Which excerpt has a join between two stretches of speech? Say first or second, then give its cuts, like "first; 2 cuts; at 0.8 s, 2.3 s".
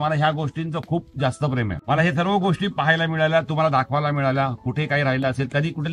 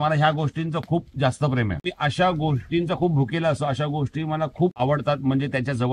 second; 2 cuts; at 1.8 s, 4.8 s